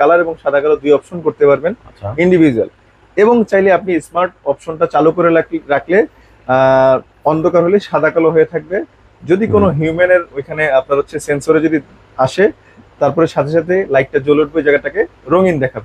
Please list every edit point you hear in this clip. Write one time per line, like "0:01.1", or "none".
none